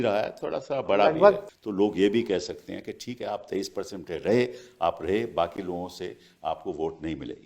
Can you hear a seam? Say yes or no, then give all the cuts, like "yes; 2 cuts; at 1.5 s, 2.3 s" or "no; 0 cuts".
yes; 1 cut; at 1.5 s